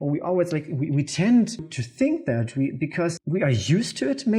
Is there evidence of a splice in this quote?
yes; 2 cuts; at 1.8 s, 3.2 s

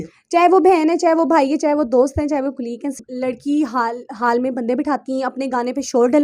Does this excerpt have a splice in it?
yes; 1 cut; at 3.0 s

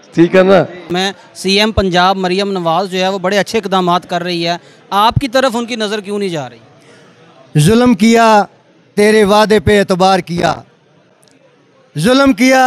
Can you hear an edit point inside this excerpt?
yes; 1 cut; at 0.9 s

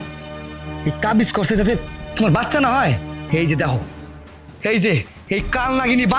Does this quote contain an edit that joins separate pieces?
yes; 1 cut; at 3.2 s

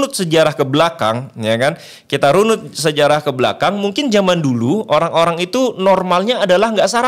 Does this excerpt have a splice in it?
no; 0 cuts

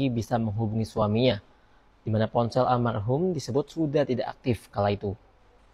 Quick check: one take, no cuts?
yes; 0 cuts

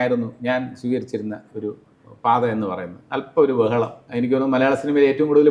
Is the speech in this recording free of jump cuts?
no; 1 cut; at 4.0 s

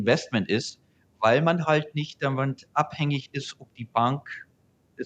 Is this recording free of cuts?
yes; 0 cuts

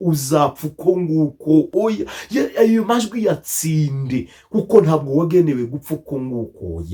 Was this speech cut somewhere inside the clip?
no; 0 cuts

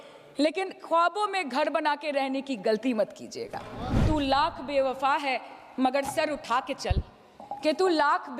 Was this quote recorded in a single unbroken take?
no; 1 cut; at 4.0 s

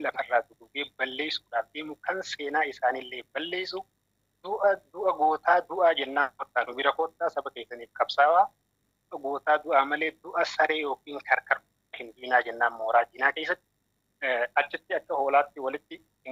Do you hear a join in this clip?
no; 0 cuts

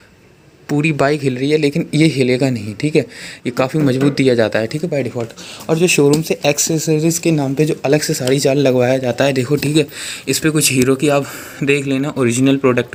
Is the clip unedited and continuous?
yes; 0 cuts

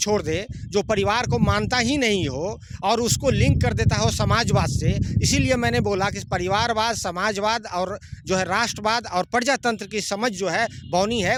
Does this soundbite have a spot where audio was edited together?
no; 0 cuts

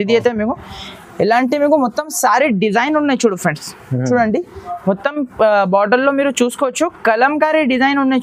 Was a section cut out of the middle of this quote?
no; 0 cuts

